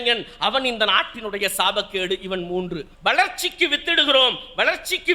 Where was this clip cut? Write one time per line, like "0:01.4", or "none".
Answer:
0:02.9